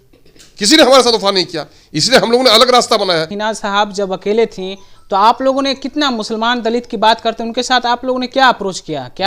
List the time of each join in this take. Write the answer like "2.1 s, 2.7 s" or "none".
3.3 s